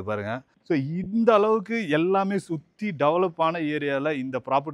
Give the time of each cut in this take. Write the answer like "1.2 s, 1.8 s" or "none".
none